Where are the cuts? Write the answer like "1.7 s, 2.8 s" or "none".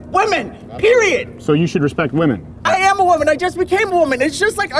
2.6 s